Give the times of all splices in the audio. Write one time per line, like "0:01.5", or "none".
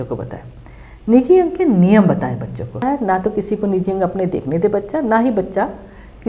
0:02.8